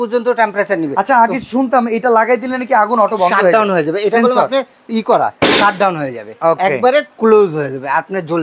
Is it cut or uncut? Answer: uncut